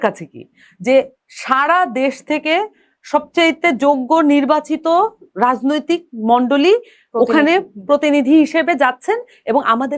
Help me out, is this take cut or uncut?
uncut